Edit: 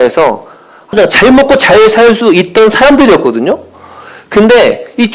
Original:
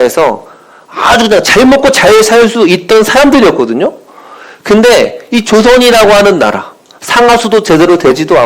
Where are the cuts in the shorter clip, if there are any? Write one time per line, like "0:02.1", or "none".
0:00.9

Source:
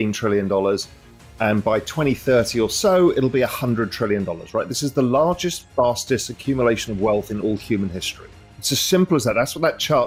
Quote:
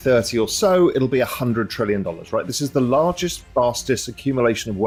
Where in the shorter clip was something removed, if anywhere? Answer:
none

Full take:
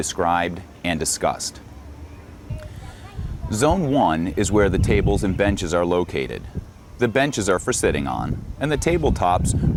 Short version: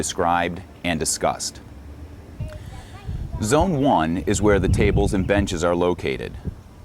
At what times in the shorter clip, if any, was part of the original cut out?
0:02.4

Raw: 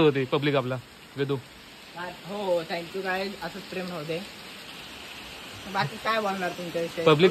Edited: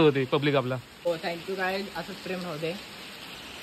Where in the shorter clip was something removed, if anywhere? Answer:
0:01.1

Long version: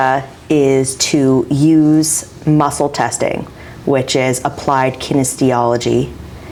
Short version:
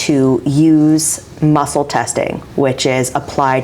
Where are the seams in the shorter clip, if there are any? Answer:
0:02.4

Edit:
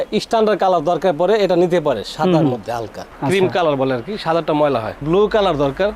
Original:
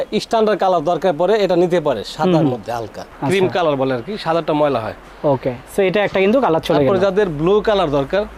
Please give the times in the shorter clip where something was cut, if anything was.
0:05.0

